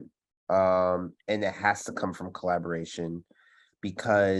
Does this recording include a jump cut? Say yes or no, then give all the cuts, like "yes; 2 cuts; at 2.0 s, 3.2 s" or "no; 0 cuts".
no; 0 cuts